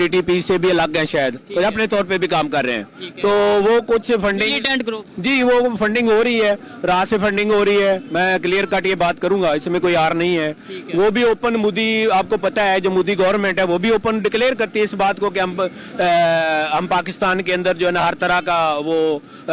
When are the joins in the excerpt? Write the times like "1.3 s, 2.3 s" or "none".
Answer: none